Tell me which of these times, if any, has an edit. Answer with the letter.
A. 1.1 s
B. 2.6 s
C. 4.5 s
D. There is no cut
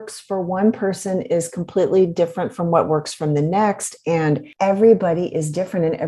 C